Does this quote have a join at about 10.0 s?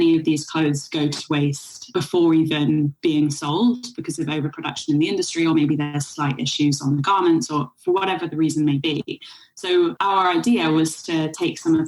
yes; 2 cuts; at 1.9 s, 10.0 s

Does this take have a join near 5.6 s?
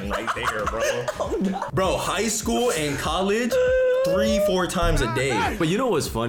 yes; 2 cuts; at 1.6 s, 5.6 s

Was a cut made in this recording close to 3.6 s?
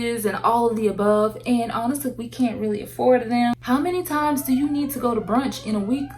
yes; 1 cut; at 3.6 s

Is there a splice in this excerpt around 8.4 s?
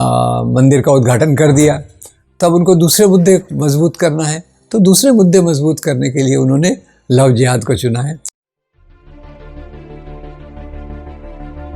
yes; 1 cut; at 8.4 s

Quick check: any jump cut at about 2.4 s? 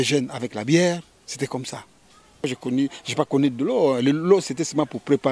yes; 1 cut; at 2.4 s

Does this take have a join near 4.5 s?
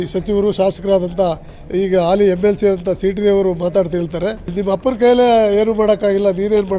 yes; 1 cut; at 4.5 s

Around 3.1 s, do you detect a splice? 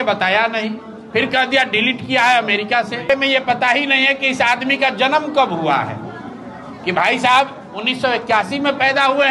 yes; 1 cut; at 3.1 s

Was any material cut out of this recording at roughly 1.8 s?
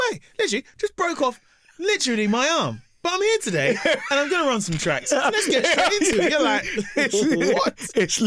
no; 0 cuts

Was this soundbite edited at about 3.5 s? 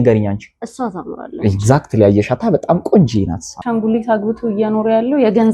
yes; 1 cut; at 3.5 s

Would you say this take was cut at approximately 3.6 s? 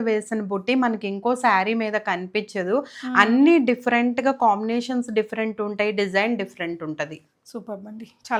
no; 0 cuts

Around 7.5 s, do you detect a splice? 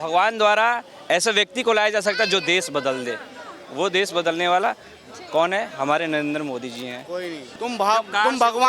yes; 1 cut; at 7.5 s

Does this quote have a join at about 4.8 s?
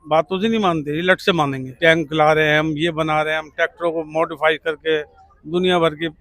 no; 1 cut; at 1.6 s

